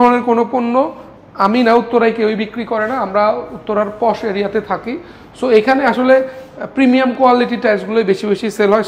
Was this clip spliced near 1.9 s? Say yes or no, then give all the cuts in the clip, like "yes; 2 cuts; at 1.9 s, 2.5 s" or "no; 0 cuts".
no; 0 cuts